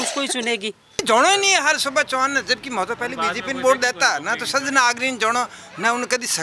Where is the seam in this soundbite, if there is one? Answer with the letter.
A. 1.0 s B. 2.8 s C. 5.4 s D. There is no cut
A